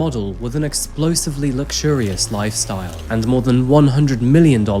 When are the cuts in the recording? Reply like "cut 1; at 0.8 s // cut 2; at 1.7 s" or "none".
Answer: cut 1; at 3.0 s